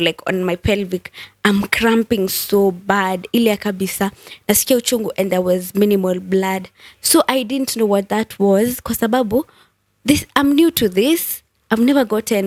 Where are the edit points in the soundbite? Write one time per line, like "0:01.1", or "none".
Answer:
none